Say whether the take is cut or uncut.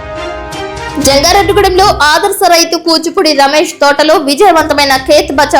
cut